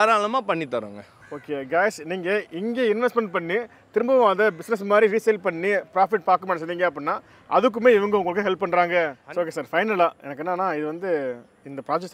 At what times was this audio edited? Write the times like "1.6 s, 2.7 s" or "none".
9.2 s